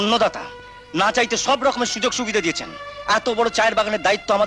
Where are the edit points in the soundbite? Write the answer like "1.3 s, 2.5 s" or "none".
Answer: none